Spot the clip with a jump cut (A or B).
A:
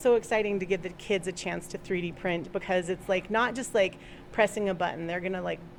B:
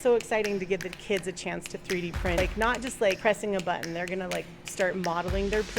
B